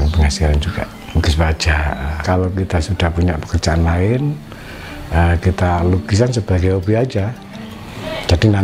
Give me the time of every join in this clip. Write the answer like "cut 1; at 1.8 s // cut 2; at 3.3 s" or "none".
cut 1; at 2.1 s